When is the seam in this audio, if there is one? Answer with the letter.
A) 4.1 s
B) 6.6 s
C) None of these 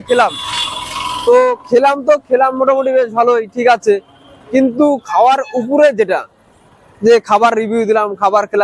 C